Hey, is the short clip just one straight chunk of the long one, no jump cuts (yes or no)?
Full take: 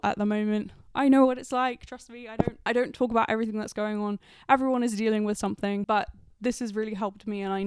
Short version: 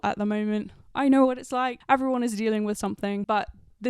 no